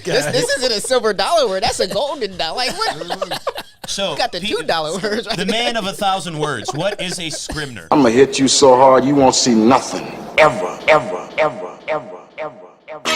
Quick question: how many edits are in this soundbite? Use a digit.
1